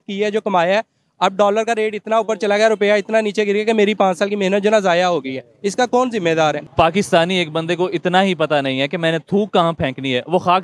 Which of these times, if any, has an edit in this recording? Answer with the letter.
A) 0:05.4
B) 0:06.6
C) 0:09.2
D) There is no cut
B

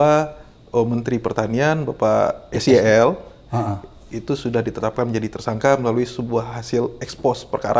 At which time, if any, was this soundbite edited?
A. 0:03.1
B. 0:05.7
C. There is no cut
C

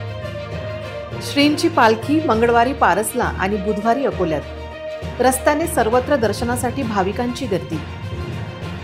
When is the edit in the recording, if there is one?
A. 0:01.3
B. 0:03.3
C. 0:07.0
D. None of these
A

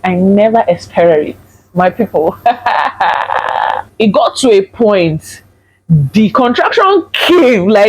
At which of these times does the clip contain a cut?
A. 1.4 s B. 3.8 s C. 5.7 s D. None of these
B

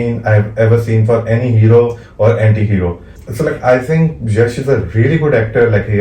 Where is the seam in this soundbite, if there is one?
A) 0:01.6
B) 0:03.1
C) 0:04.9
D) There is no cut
B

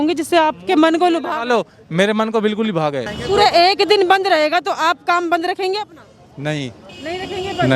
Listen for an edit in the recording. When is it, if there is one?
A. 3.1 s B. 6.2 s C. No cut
A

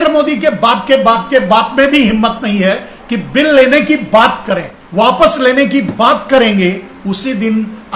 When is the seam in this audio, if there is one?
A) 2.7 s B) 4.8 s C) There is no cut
B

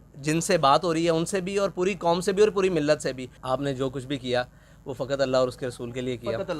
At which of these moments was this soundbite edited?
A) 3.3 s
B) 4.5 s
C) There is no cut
A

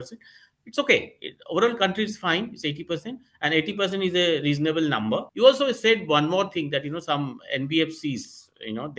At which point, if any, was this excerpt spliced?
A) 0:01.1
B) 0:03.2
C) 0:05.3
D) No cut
C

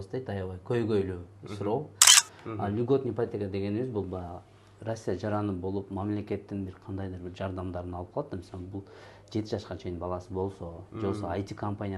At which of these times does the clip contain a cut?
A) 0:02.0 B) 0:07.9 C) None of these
A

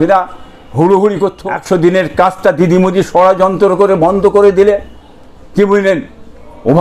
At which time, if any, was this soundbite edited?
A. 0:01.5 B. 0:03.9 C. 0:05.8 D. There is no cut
A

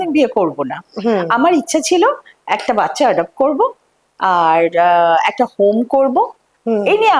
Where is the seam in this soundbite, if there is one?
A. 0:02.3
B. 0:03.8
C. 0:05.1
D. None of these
D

